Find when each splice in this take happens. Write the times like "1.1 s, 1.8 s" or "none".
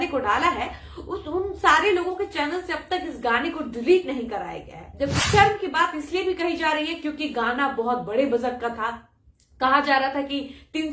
5.1 s